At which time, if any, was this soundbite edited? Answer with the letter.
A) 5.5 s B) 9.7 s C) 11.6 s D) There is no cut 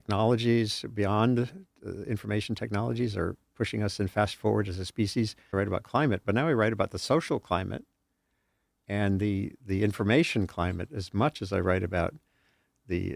A